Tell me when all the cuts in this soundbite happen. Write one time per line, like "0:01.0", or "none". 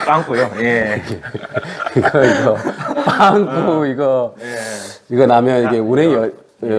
none